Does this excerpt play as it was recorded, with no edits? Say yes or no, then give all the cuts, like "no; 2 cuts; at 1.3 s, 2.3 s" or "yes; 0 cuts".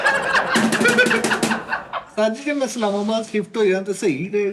no; 1 cut; at 2.1 s